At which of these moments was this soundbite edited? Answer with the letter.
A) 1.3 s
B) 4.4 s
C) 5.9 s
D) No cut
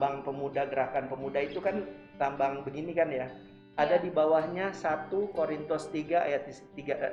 D